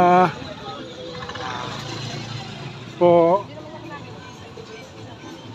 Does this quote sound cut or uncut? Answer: uncut